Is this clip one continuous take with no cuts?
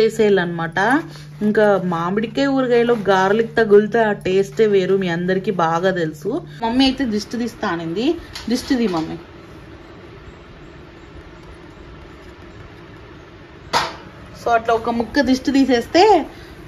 no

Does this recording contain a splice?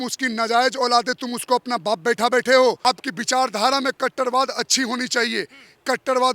yes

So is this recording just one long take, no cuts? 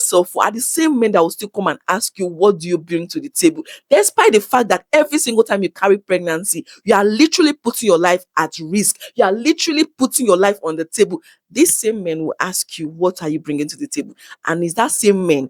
yes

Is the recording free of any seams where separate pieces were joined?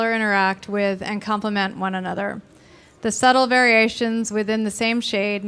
no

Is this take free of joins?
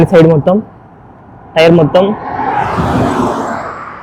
yes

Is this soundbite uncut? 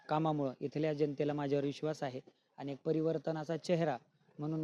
yes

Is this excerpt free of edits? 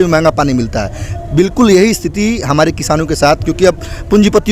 yes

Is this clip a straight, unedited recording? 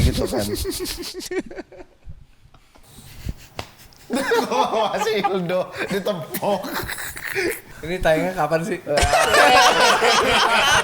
no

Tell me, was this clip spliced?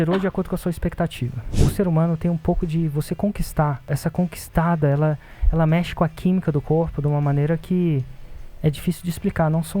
yes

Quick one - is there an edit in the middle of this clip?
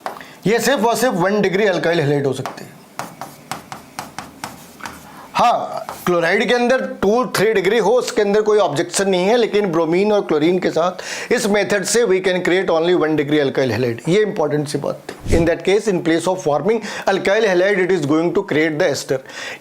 yes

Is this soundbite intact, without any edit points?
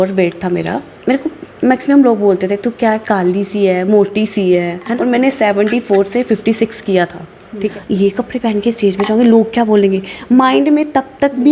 no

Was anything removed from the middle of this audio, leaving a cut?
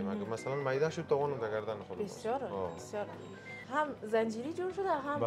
yes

